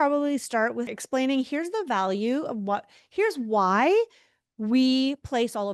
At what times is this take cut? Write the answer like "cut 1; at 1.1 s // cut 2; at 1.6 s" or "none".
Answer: cut 1; at 0.9 s